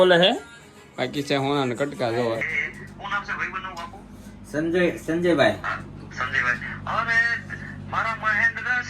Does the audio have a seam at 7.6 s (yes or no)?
no